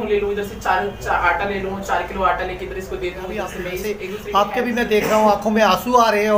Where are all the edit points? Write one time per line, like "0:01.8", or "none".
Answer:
0:04.2